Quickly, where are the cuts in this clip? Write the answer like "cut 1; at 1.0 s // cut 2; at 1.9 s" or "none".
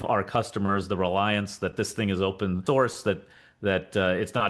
cut 1; at 2.6 s